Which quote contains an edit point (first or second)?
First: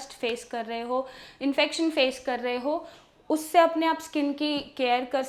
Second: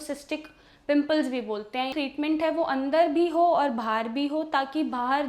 second